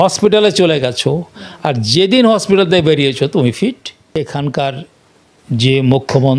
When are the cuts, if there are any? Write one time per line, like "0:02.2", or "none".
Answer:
0:03.9